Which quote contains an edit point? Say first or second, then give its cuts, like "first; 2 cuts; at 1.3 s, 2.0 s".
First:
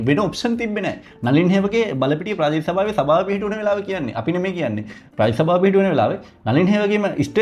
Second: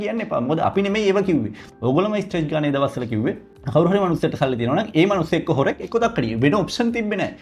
second; 2 cuts; at 1.6 s, 3.5 s